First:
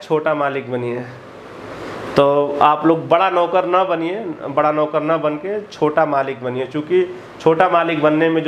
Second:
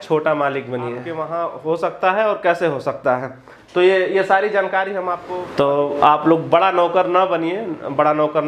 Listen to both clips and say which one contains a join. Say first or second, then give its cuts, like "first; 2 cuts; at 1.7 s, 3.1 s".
second; 2 cuts; at 1.1 s, 5.2 s